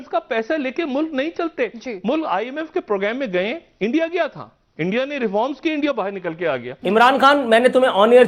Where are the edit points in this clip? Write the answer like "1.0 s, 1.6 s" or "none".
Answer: 6.7 s